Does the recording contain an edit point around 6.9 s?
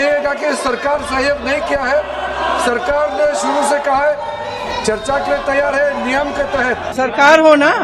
yes; 1 cut; at 6.9 s

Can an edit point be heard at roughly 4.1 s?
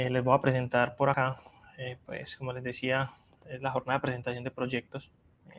no; 1 cut; at 1.1 s

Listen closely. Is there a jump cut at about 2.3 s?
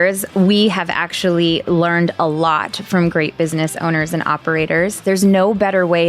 no; 1 cut; at 5.0 s

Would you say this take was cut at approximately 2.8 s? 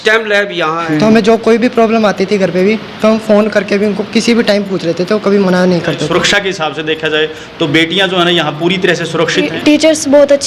no; 3 cuts; at 0.9 s, 6.0 s, 9.4 s

